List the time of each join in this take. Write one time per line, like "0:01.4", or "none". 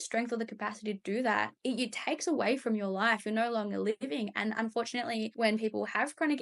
0:01.5
0:05.3